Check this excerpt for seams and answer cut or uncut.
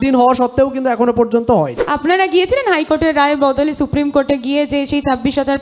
cut